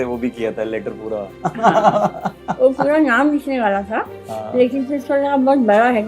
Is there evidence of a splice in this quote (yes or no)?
yes